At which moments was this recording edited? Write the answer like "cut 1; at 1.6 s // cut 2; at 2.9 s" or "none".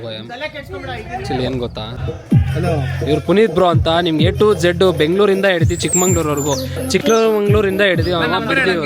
cut 1; at 2.1 s